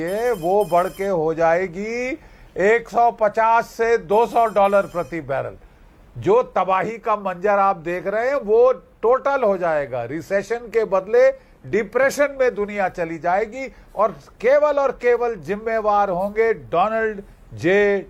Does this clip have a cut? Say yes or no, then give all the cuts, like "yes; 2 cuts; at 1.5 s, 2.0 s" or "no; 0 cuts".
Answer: no; 0 cuts